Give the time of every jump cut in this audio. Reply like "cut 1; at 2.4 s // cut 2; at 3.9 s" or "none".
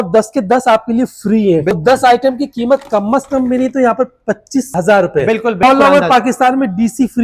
cut 1; at 1.7 s // cut 2; at 5.6 s